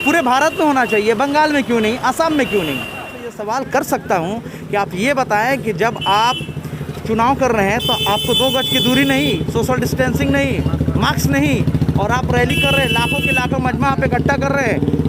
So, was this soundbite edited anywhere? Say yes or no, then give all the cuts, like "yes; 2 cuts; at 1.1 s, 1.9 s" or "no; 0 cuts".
yes; 1 cut; at 3.3 s